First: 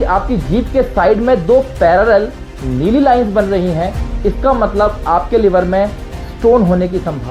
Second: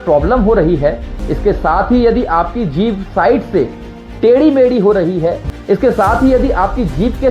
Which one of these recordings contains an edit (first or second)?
second